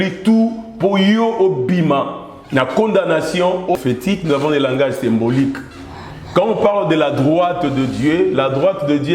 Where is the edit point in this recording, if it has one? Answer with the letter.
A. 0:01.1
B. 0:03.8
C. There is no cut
B